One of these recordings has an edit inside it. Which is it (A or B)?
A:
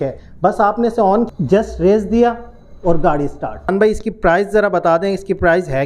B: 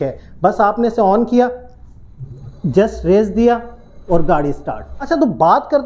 A